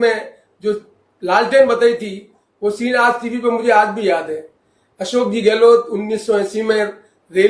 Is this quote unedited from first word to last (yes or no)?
yes